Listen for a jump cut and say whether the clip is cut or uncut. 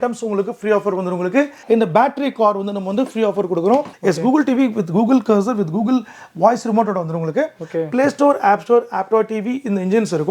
cut